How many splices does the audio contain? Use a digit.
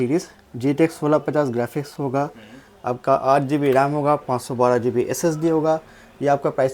0